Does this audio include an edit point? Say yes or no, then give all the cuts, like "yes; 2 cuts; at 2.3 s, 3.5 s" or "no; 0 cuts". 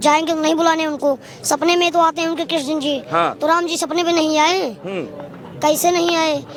no; 0 cuts